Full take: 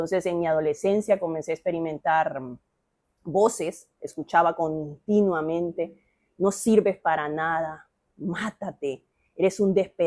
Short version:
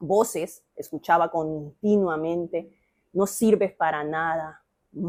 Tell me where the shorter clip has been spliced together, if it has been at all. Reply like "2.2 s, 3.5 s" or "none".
none